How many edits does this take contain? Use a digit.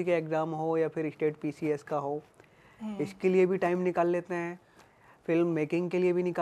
0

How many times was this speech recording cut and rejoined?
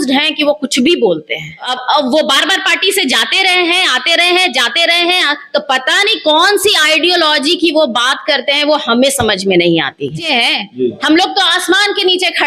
2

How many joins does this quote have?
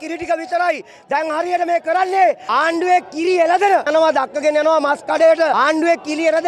3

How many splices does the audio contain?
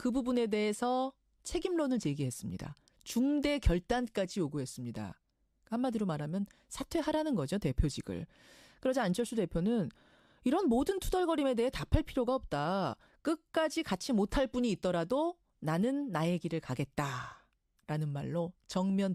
1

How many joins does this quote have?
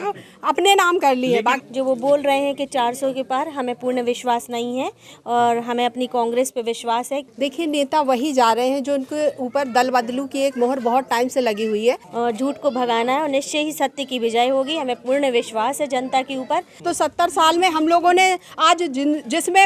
4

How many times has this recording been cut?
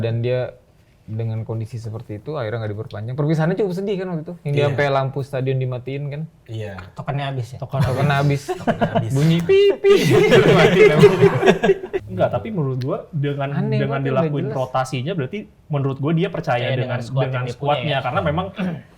1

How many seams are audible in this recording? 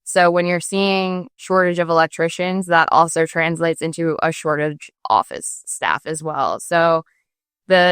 2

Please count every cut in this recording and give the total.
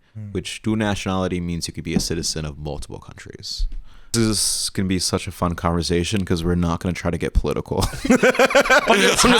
1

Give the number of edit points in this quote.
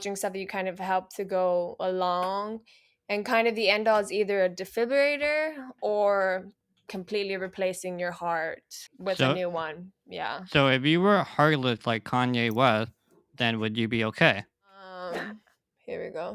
1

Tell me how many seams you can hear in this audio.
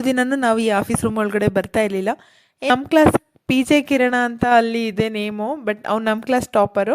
1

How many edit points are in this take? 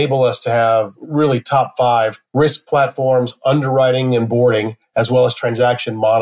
2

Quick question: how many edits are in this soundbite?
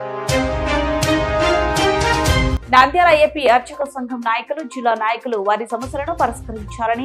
2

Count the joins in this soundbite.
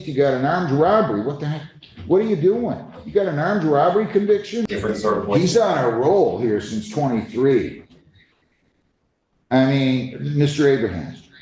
1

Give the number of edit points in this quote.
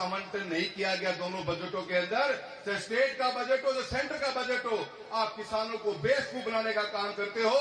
0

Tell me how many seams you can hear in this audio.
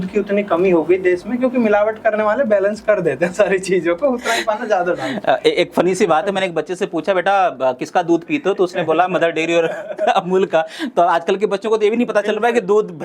0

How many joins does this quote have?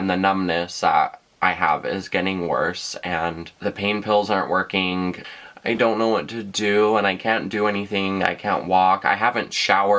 1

